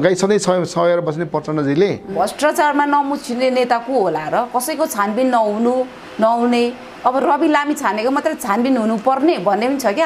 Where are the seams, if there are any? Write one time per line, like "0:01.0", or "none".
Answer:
0:02.1